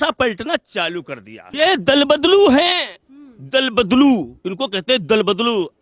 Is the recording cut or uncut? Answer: cut